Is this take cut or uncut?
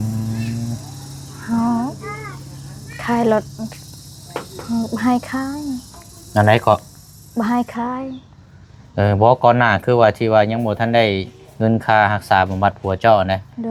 uncut